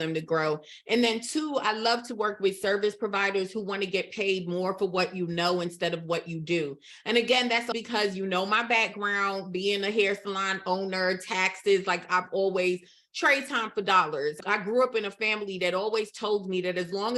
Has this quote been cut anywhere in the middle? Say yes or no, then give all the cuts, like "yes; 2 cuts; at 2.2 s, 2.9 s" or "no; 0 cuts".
yes; 2 cuts; at 7.7 s, 14.4 s